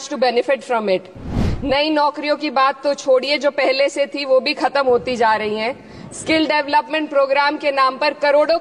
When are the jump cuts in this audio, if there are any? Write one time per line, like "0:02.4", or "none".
0:01.4

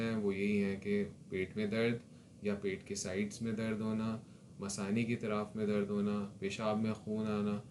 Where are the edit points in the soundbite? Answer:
none

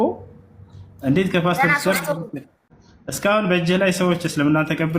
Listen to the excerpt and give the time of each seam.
0:03.1

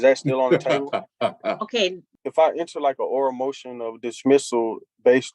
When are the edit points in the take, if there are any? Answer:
0:02.1

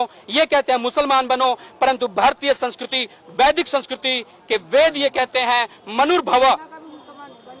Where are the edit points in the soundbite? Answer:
none

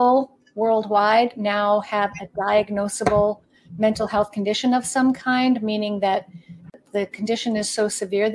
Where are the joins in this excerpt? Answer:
0:06.7

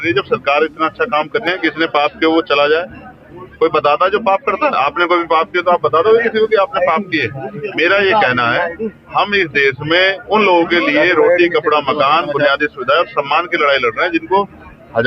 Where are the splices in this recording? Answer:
0:01.5

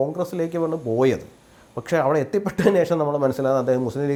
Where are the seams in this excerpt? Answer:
none

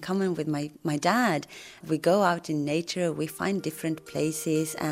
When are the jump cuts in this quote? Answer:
0:01.8

